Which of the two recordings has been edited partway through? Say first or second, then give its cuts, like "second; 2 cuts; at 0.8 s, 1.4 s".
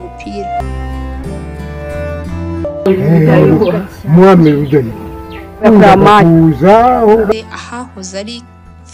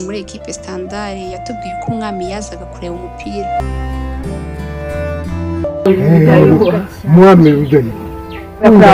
first; 1 cut; at 7.3 s